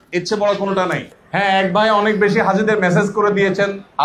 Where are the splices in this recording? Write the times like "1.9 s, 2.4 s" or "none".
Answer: 1.1 s